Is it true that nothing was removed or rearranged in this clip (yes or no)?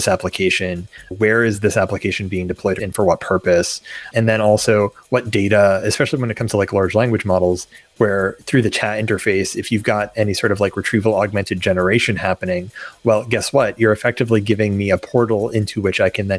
no